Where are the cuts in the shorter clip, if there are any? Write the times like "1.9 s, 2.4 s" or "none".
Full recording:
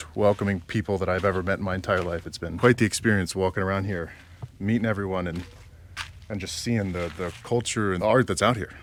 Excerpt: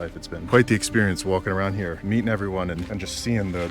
2.0 s, 2.9 s